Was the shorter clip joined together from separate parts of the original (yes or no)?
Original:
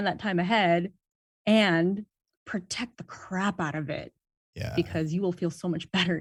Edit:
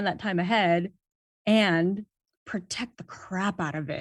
no